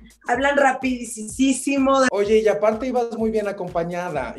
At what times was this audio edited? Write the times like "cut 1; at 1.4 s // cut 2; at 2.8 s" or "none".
cut 1; at 2.1 s

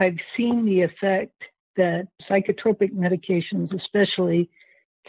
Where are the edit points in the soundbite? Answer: cut 1; at 2.2 s

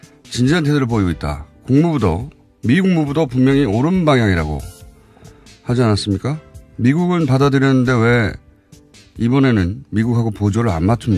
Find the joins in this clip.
cut 1; at 6.9 s

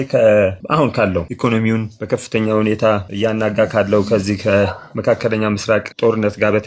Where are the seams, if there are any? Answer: cut 1; at 1.3 s

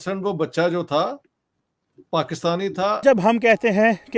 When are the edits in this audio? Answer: cut 1; at 3.0 s

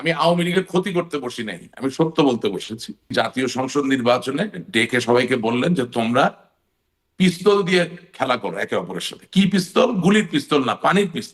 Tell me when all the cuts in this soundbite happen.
cut 1; at 3.1 s

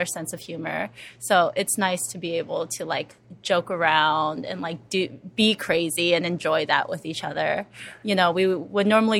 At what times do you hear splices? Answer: none

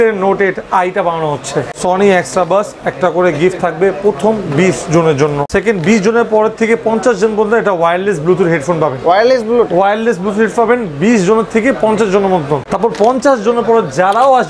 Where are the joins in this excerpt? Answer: cut 1; at 1.7 s // cut 2; at 5.5 s // cut 3; at 12.7 s

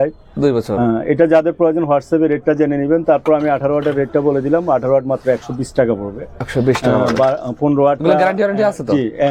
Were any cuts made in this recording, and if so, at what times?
none

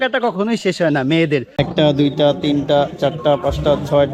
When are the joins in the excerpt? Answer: cut 1; at 1.5 s

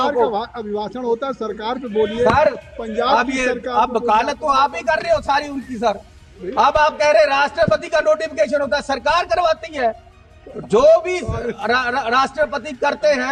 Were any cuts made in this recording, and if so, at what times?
none

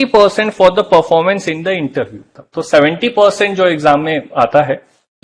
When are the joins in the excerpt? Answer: cut 1; at 2.4 s

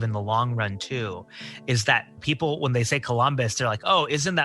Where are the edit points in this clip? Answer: cut 1; at 2.2 s

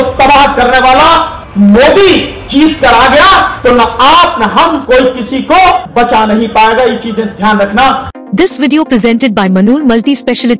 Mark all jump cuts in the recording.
cut 1; at 1.4 s // cut 2; at 2.4 s // cut 3; at 3.5 s // cut 4; at 4.8 s // cut 5; at 5.9 s // cut 6; at 8.1 s

